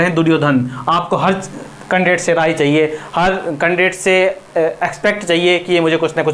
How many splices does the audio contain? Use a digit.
0